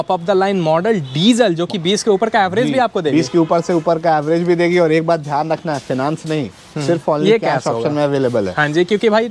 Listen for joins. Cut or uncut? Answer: uncut